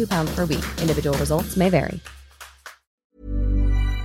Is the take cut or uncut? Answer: cut